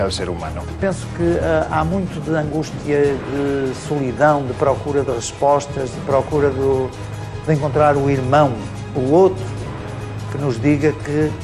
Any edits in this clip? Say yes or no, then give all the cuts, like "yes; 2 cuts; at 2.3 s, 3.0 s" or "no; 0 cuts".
no; 0 cuts